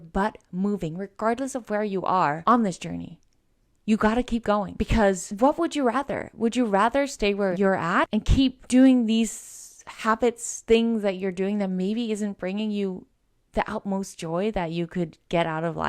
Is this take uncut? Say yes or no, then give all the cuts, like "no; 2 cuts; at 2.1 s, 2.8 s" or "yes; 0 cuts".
no; 1 cut; at 7.6 s